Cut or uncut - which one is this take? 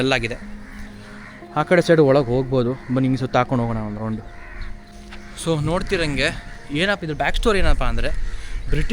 uncut